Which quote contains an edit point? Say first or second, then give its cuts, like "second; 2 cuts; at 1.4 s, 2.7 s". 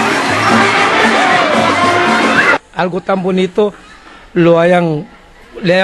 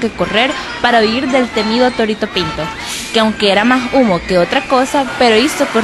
first; 1 cut; at 2.6 s